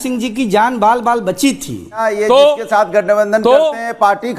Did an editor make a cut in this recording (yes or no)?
yes